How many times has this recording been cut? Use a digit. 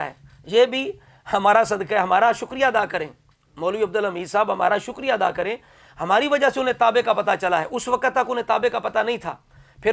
0